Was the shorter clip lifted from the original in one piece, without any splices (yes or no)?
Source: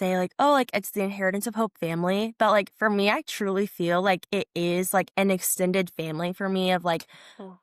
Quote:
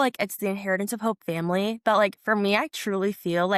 yes